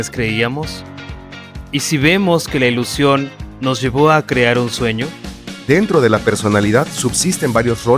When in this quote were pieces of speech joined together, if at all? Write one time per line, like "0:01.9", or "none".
0:05.5